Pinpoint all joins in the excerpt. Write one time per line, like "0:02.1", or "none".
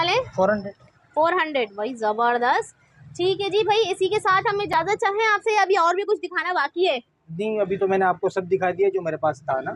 none